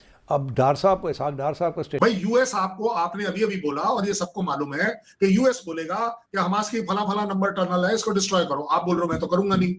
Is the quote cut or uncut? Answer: cut